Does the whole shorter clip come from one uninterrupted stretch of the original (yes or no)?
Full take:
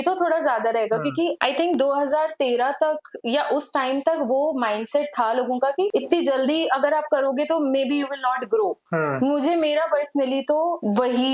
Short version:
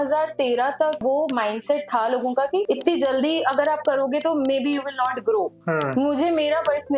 no